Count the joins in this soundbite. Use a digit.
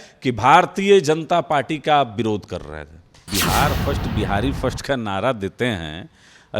1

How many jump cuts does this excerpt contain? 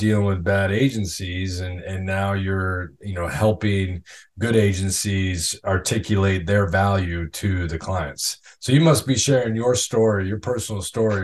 0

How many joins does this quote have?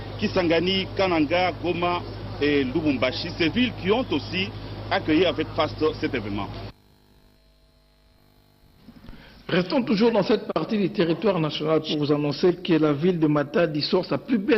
0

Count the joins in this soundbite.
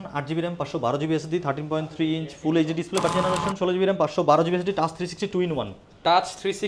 1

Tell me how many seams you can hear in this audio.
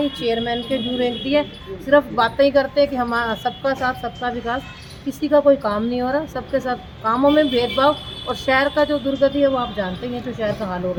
0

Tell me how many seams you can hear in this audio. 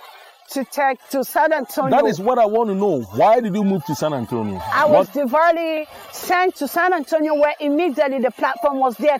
1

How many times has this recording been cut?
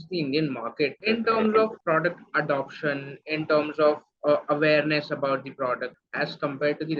3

